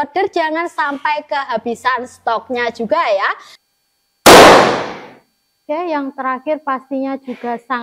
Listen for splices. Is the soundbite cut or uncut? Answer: cut